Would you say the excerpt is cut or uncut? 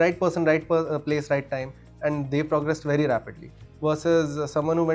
uncut